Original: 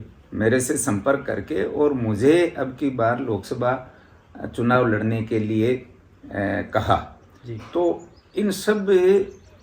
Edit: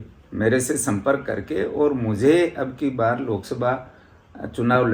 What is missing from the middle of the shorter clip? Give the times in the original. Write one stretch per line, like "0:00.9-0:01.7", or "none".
none